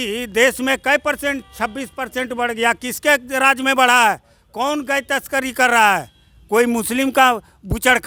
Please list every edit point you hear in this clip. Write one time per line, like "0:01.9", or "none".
none